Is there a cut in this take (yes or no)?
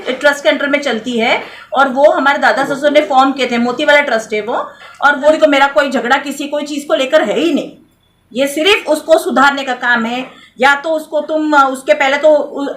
yes